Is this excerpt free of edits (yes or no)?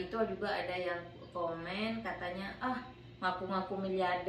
yes